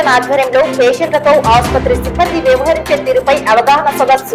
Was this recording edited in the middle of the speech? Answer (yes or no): no